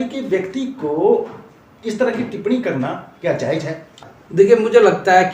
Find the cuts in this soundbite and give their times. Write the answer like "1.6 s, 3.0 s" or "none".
3.9 s